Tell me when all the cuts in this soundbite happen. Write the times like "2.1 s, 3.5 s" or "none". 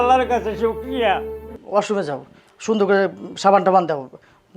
1.5 s